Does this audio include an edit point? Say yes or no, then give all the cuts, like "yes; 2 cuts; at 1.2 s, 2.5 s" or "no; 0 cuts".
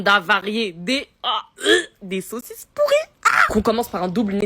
yes; 1 cut; at 1.3 s